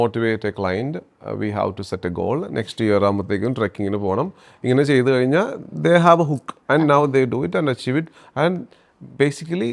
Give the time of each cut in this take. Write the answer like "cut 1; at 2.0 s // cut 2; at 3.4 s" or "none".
none